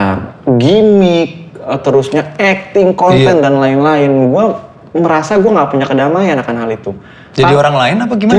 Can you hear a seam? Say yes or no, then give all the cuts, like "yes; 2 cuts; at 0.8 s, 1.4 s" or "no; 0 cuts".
no; 0 cuts